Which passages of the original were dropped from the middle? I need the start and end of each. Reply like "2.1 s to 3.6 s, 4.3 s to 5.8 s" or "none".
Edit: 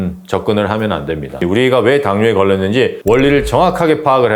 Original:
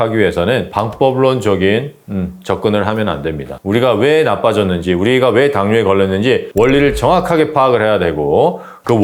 3.6 s to 4.9 s